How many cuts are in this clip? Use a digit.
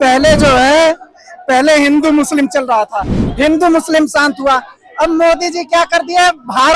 0